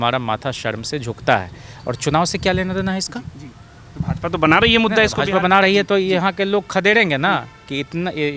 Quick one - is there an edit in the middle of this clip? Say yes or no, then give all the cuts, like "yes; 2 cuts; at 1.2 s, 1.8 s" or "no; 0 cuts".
no; 0 cuts